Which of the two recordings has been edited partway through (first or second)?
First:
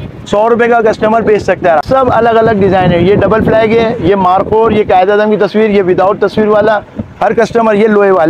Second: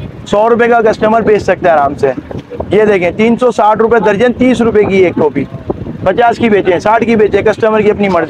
first